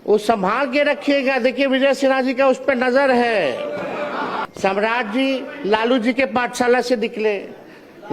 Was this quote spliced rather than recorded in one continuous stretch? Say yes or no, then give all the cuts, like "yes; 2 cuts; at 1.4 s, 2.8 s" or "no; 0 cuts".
yes; 1 cut; at 4.5 s